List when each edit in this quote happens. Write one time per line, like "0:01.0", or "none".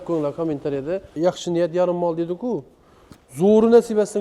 0:01.1